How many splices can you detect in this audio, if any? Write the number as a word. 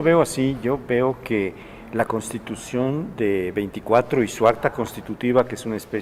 zero